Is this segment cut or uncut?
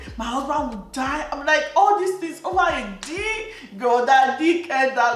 uncut